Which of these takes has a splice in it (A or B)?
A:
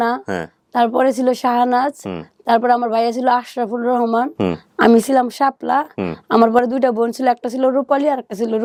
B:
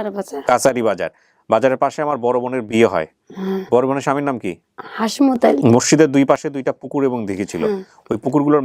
B